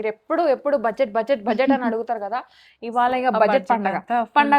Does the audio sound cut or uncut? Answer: uncut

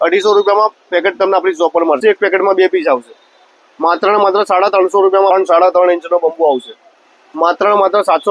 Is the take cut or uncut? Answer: cut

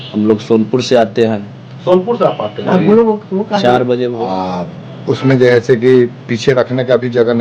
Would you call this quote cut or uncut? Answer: cut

